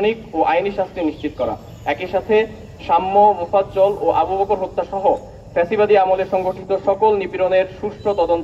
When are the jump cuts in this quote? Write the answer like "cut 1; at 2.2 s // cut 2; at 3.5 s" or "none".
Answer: none

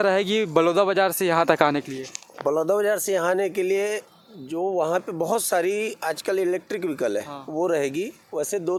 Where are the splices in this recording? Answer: none

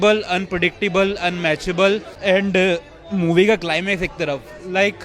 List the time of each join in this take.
cut 1; at 2.1 s

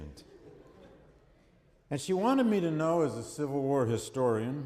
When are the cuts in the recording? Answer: cut 1; at 3.0 s

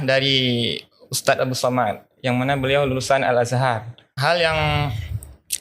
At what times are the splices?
cut 1; at 4.1 s

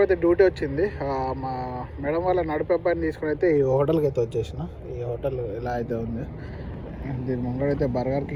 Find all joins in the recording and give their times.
none

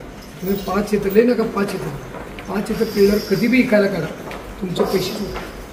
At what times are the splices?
none

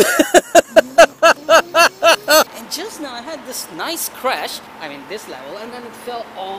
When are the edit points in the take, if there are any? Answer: cut 1; at 2.5 s // cut 2; at 4.7 s

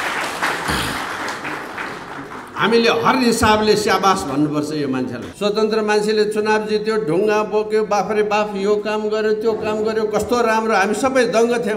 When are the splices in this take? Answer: cut 1; at 5.2 s

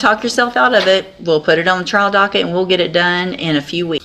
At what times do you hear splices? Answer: none

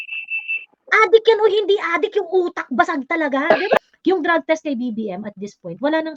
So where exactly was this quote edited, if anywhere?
cut 1; at 3.8 s

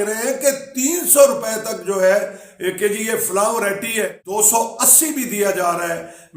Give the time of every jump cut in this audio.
cut 1; at 4.2 s

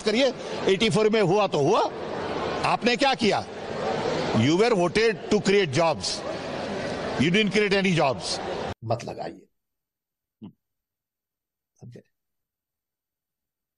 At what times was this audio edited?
cut 1; at 8.8 s

